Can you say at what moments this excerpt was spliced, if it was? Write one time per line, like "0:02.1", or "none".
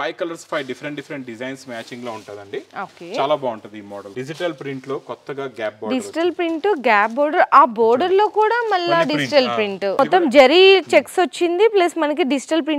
0:04.1
0:10.0